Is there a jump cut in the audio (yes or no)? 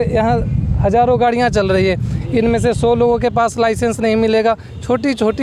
no